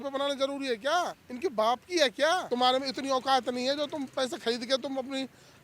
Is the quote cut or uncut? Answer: cut